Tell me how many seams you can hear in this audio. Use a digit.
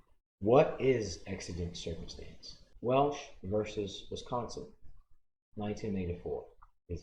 0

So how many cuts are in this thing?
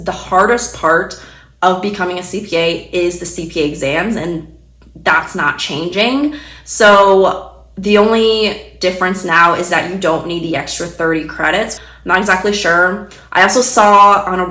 1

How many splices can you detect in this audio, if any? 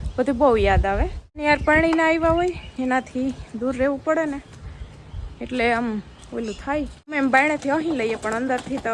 2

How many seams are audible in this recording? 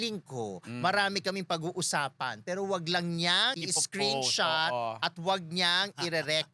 1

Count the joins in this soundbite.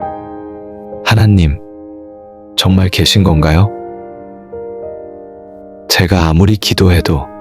1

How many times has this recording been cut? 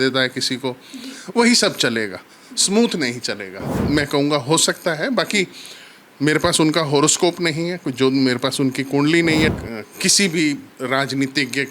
2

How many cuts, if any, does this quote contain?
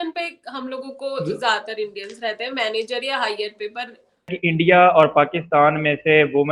1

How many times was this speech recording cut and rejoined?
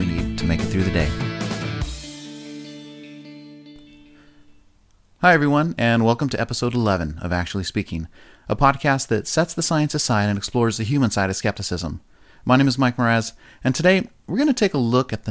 1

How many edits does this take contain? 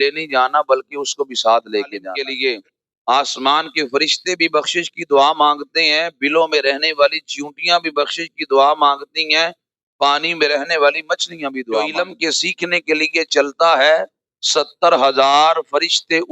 2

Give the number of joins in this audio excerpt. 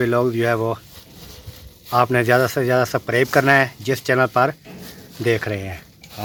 0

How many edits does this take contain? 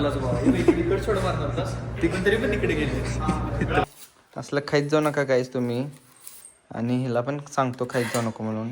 1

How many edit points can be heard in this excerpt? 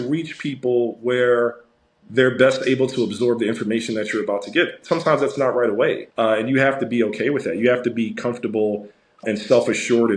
2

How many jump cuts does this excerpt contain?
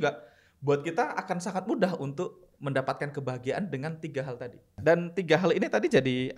1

